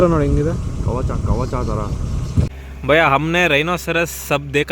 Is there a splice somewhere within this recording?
yes; 1 cut; at 2.5 s

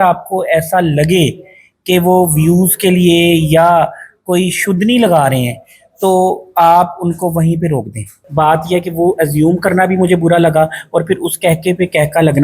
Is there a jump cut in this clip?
yes; 1 cut; at 8.1 s

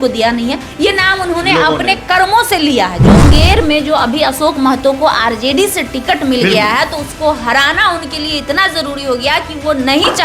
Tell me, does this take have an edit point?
yes; 1 cut; at 3.2 s

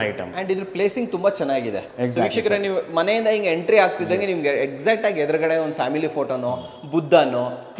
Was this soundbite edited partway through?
no; 0 cuts

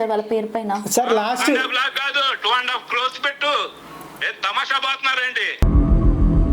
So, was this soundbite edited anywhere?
no; 0 cuts

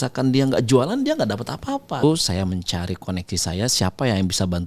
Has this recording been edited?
yes; 1 cut; at 2.0 s

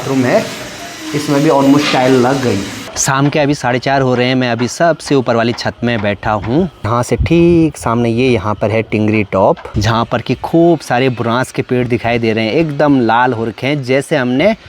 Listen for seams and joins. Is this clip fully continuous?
yes; 0 cuts

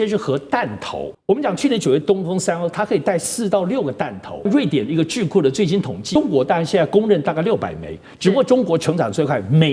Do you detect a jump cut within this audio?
yes; 4 cuts; at 1.1 s, 2.0 s, 4.5 s, 6.2 s

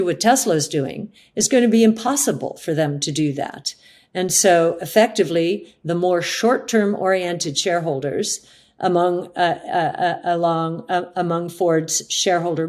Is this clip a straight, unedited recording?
no; 1 cut; at 4.3 s

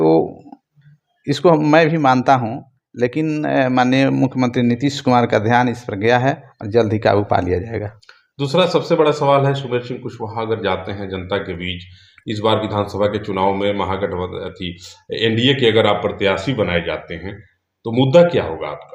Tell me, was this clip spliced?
no; 0 cuts

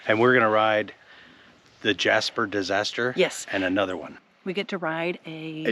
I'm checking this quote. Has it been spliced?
yes; 1 cut; at 4.1 s

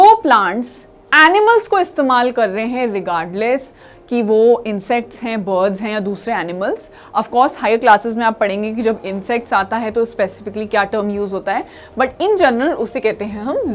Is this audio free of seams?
yes; 0 cuts

